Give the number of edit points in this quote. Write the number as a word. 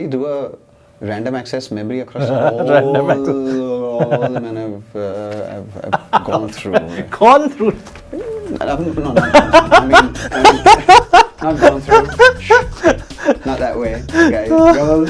zero